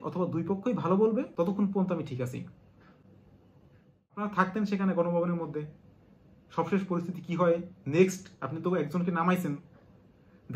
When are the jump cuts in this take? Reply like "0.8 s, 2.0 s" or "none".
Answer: 1.3 s, 4.2 s